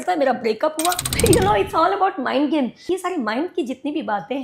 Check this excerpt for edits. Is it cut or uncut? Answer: cut